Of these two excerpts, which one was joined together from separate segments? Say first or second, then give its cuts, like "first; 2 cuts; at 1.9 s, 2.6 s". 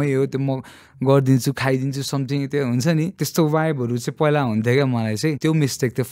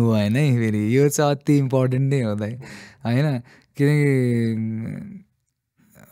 first; 2 cuts; at 3.1 s, 5.4 s